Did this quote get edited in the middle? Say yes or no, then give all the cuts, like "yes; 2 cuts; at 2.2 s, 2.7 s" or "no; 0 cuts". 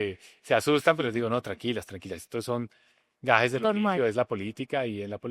no; 0 cuts